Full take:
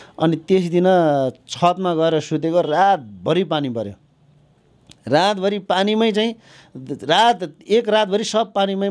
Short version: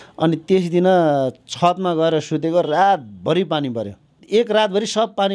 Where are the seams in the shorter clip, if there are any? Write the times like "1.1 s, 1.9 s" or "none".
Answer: 4.1 s